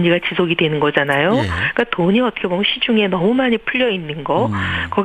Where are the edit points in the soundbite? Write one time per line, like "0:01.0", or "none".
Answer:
none